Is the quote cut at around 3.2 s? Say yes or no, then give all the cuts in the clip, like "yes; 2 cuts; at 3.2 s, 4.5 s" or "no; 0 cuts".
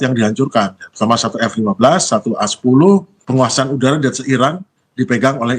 yes; 1 cut; at 3.2 s